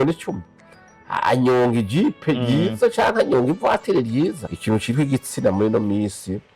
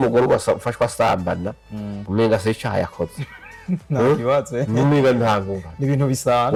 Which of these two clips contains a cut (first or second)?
first